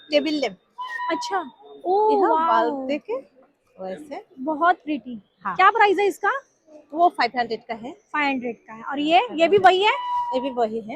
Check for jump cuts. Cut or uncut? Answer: uncut